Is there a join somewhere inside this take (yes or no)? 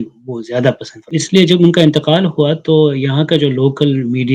yes